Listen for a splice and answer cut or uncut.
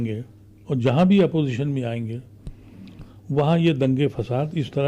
uncut